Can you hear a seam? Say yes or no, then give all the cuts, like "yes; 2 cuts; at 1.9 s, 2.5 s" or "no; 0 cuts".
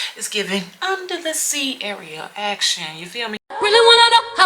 yes; 1 cut; at 3.4 s